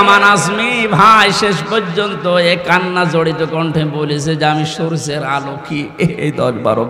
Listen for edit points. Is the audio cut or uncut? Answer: uncut